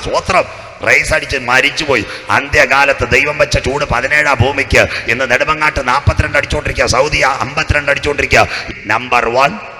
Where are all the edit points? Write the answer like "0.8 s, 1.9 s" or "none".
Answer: 8.6 s